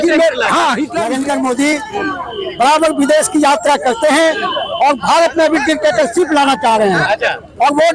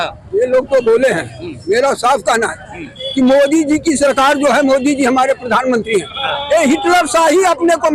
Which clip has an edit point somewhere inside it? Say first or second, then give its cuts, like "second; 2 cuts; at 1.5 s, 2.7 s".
first; 1 cut; at 1.0 s